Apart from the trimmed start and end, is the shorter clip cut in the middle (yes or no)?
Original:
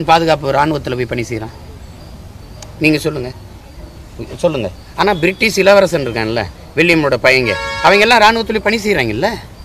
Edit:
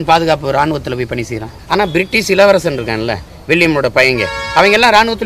yes